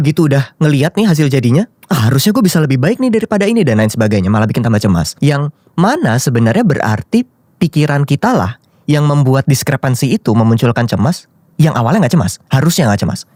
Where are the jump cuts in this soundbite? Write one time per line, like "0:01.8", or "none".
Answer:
none